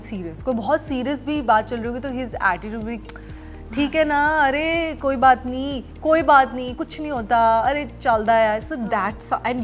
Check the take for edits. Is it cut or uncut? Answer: uncut